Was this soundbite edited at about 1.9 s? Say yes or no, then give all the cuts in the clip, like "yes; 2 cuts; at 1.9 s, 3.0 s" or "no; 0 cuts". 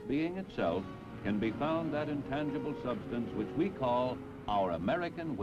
yes; 1 cut; at 1.9 s